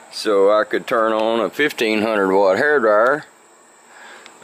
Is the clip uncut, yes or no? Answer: yes